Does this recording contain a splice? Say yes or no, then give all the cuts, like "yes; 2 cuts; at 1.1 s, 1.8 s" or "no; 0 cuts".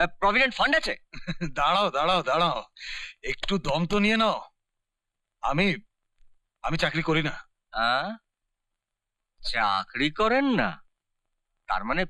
no; 0 cuts